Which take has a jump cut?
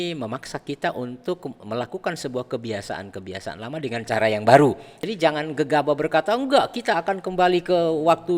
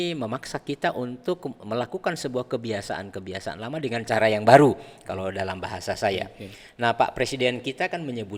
first; 1 cut; at 5.0 s

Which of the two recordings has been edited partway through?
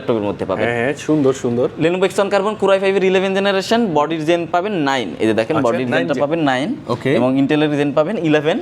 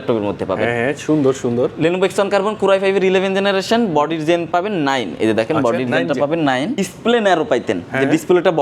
second; 1 cut; at 6.8 s

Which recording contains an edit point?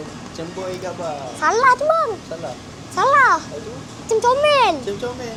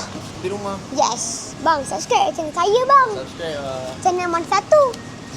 second; 2 cuts; at 1.5 s, 3.9 s

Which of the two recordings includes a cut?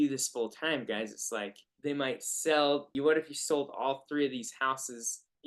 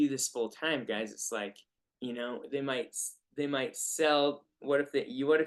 first; 2 cuts; at 1.6 s, 2.9 s

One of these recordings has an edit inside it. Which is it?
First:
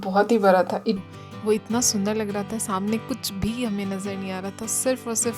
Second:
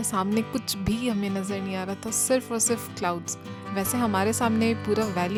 first; 1 cut; at 1.0 s

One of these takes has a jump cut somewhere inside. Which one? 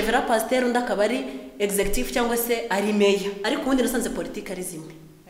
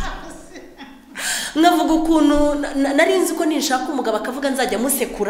first; 1 cut; at 3.4 s

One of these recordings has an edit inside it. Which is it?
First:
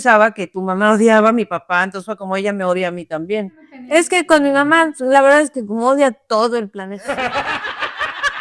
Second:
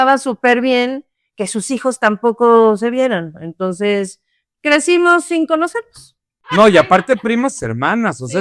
second; 1 cut; at 6.4 s

